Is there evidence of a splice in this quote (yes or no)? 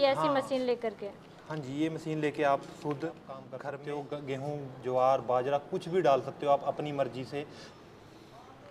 yes